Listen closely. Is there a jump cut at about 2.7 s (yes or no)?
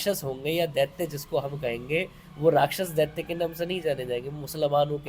no